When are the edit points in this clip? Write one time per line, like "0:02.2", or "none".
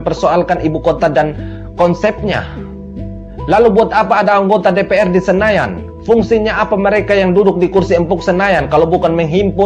none